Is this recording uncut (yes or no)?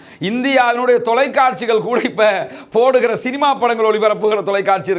yes